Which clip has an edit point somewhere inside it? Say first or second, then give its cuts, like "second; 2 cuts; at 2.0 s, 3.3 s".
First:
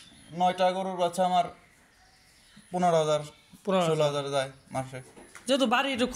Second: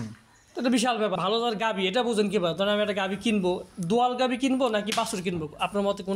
second; 1 cut; at 1.2 s